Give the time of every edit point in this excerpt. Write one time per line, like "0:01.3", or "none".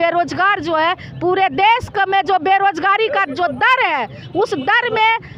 none